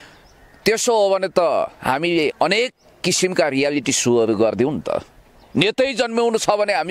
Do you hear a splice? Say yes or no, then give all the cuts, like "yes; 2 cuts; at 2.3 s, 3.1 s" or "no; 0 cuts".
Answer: no; 0 cuts